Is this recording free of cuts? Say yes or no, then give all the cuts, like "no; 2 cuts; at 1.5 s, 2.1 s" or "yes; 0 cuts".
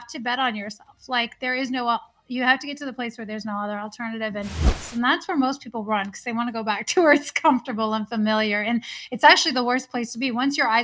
no; 1 cut; at 4.7 s